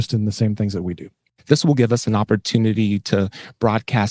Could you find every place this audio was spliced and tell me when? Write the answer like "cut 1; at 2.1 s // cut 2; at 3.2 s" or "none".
cut 1; at 1.1 s